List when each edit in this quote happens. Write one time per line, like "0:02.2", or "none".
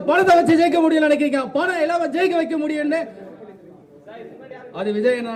none